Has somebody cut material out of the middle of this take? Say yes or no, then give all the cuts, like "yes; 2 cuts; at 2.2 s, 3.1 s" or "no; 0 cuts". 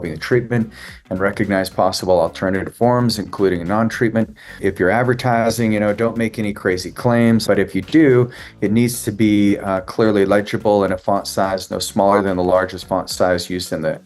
yes; 2 cuts; at 4.6 s, 7.4 s